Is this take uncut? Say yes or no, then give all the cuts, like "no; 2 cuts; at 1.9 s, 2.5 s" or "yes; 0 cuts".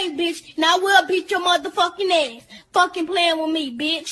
yes; 0 cuts